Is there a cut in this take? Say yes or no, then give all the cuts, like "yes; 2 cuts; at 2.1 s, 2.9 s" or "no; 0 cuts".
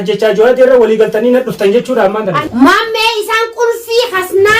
yes; 1 cut; at 2.3 s